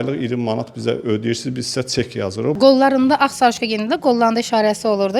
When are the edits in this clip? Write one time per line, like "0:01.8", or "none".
0:02.5